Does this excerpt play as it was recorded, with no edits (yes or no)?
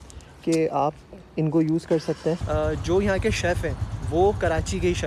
no